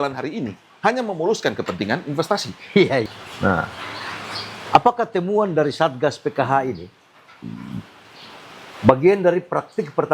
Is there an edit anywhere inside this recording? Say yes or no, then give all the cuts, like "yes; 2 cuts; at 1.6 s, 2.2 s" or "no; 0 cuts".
yes; 1 cut; at 3.1 s